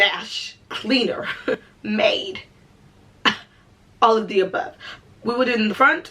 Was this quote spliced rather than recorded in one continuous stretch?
no; 0 cuts

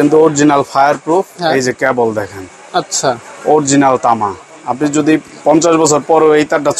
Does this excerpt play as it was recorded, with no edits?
yes; 0 cuts

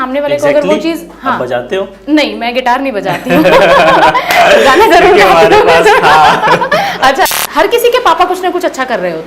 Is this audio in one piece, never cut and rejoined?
no; 1 cut; at 7.3 s

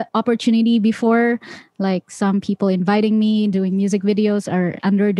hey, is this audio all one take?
yes; 0 cuts

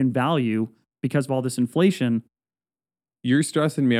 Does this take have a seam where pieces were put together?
no; 0 cuts

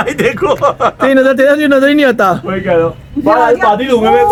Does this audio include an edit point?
no; 0 cuts

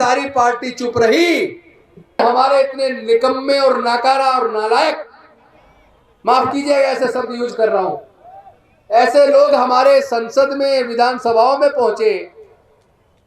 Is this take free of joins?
no; 1 cut; at 2.2 s

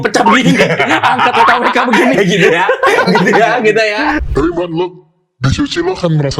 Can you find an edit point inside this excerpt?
yes; 1 cut; at 4.2 s

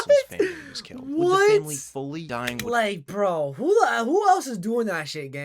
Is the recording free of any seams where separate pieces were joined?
no; 1 cut; at 2.3 s

